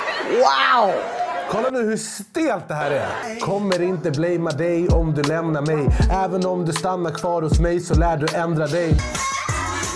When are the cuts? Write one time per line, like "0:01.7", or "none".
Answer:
0:03.2
0:09.0